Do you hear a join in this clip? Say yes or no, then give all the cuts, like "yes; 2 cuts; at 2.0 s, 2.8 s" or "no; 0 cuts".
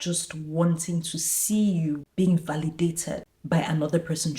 yes; 2 cuts; at 2.1 s, 3.3 s